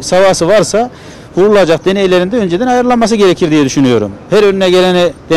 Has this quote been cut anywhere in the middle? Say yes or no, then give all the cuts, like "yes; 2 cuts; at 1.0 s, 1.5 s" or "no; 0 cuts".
no; 0 cuts